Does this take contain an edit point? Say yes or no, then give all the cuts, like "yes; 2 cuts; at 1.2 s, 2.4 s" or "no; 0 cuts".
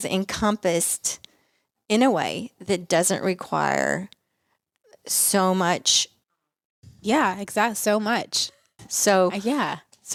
no; 0 cuts